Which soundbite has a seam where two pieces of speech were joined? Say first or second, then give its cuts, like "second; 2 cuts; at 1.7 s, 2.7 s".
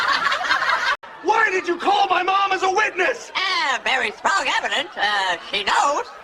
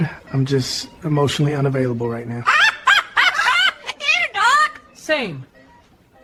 first; 1 cut; at 1.0 s